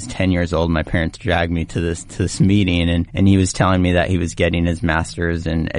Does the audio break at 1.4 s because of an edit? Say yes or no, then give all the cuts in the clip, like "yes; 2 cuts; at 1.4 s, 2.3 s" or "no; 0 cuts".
no; 1 cut; at 3.1 s